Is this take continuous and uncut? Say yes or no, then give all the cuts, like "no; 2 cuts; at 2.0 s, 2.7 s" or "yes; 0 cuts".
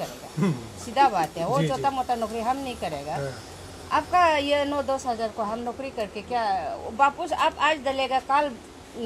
yes; 0 cuts